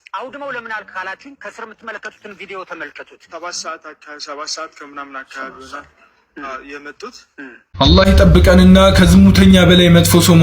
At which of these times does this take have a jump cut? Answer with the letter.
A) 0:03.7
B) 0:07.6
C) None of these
B